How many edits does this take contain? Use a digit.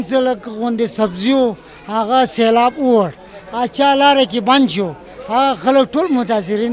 0